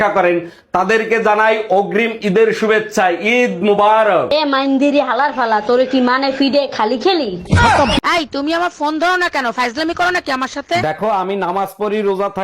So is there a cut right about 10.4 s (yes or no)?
no